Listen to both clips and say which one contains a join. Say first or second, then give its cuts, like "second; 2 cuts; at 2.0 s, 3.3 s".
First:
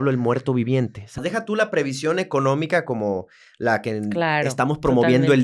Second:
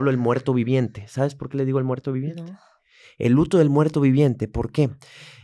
first; 1 cut; at 1.2 s